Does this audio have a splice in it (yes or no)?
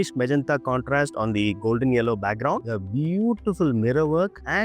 yes